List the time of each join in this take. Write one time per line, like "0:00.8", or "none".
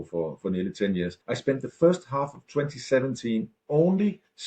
0:01.2
0:03.6